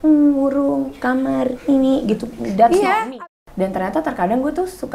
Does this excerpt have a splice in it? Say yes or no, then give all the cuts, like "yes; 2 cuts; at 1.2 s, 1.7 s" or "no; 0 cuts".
yes; 1 cut; at 3.1 s